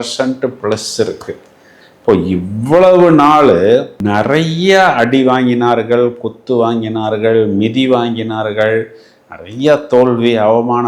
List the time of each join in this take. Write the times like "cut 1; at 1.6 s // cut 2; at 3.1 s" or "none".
none